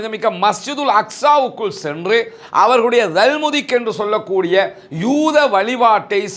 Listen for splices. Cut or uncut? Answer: uncut